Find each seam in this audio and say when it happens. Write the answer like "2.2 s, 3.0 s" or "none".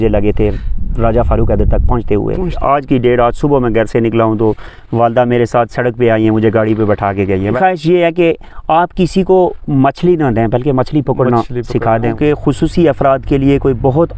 2.6 s, 7.6 s, 12.0 s